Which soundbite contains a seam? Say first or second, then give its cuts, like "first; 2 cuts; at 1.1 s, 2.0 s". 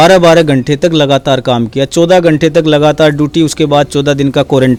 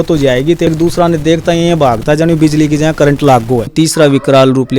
second; 2 cuts; at 0.7 s, 3.7 s